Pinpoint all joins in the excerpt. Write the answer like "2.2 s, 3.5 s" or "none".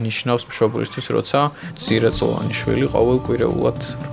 1.8 s